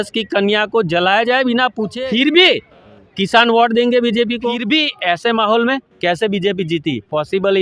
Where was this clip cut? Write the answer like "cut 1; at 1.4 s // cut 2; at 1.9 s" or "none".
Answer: cut 1; at 1.9 s // cut 2; at 4.6 s